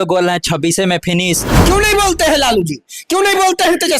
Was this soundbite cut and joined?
yes; 1 cut; at 1.5 s

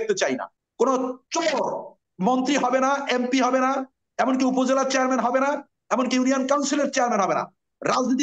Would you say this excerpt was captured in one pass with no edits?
no; 2 cuts; at 1.0 s, 2.0 s

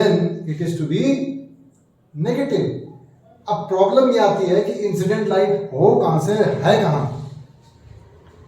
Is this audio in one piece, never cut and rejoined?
yes; 0 cuts

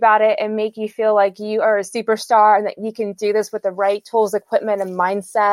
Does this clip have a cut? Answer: no; 0 cuts

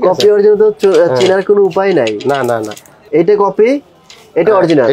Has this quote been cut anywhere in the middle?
yes; 1 cut; at 3.0 s

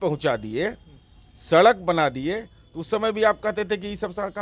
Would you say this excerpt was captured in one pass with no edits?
yes; 0 cuts

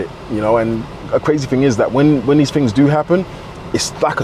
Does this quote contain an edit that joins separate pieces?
yes; 1 cut; at 1.1 s

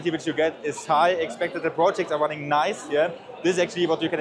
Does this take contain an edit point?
no; 0 cuts

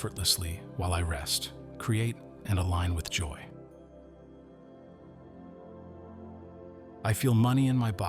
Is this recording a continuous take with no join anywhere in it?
no; 2 cuts; at 3.3 s, 6.8 s

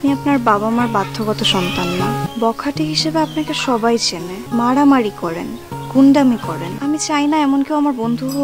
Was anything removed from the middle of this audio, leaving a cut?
yes; 3 cuts; at 2.3 s, 4.4 s, 6.7 s

